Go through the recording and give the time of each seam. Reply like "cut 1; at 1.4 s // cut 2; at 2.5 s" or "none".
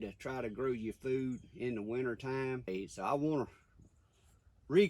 cut 1; at 2.7 s